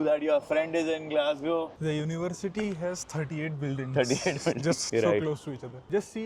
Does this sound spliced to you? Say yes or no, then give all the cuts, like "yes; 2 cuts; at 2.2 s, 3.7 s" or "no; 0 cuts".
yes; 2 cuts; at 1.7 s, 4.8 s